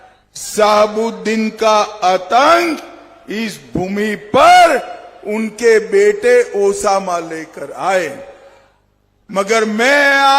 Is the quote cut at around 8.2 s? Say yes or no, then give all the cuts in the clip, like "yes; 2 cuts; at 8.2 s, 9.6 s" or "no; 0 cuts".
no; 0 cuts